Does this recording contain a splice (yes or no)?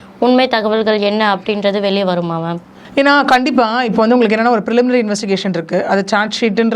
no